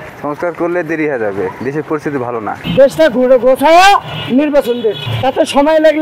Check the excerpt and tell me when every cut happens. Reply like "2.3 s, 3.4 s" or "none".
2.6 s, 4.1 s, 5.1 s